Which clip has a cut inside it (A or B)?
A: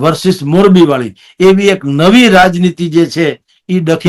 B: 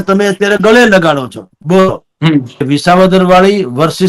B